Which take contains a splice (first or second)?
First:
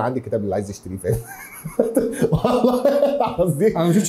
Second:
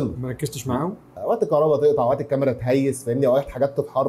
second